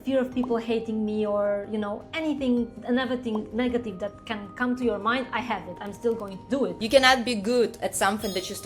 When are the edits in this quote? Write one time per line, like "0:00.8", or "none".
0:05.8
0:06.8